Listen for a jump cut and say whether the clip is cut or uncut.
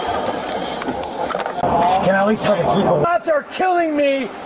cut